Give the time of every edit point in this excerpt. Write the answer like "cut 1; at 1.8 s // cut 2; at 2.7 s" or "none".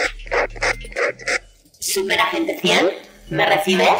cut 1; at 1.2 s